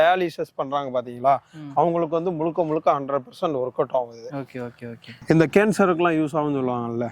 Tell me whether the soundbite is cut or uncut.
cut